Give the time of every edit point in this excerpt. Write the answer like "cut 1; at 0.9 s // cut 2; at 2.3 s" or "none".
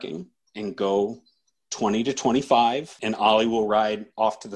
cut 1; at 3.0 s